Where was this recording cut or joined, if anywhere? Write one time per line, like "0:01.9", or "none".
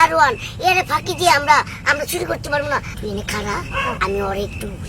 0:02.9